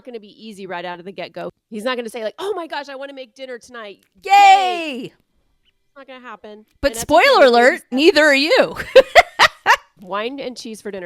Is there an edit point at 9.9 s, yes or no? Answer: yes